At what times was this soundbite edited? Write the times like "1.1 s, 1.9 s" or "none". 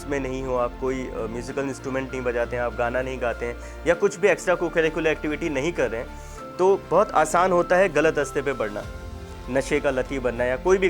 none